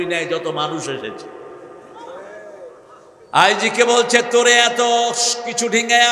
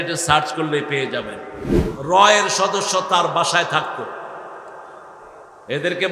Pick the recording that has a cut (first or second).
second